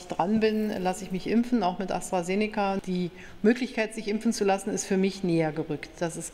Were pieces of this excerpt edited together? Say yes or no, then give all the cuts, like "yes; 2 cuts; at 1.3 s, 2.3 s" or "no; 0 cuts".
yes; 1 cut; at 2.8 s